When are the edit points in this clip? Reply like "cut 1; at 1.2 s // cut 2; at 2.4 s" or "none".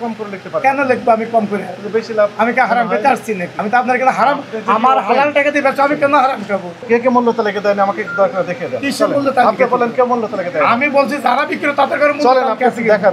cut 1; at 3.5 s // cut 2; at 6.8 s